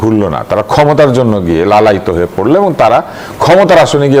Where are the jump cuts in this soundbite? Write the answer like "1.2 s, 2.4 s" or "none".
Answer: none